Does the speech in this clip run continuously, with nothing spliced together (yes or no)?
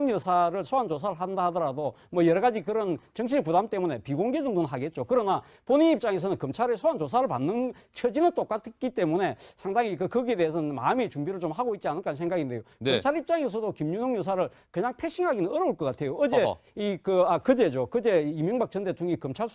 no